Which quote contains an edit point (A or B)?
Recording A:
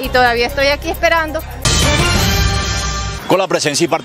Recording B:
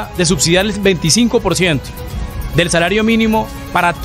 A